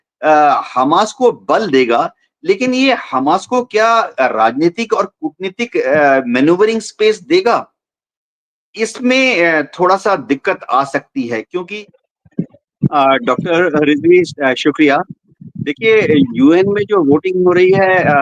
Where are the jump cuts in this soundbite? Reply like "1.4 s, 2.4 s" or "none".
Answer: 11.7 s